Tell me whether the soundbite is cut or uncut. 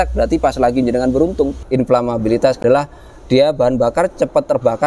cut